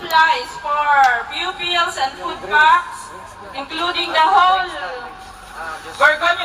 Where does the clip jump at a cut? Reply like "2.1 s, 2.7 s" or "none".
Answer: none